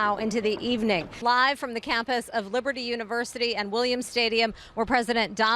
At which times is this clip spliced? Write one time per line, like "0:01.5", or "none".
0:01.2